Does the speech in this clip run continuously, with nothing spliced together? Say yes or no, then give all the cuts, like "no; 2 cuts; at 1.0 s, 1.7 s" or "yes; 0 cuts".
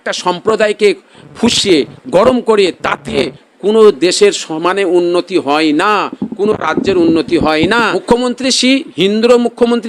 no; 1 cut; at 8.0 s